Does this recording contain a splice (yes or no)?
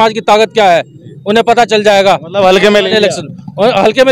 no